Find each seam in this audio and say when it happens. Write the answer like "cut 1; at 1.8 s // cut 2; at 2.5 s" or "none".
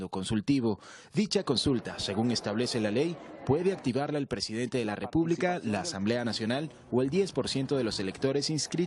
cut 1; at 6.0 s